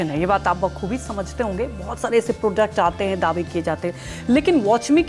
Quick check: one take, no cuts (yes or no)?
yes